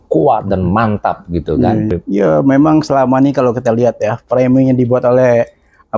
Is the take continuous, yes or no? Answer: no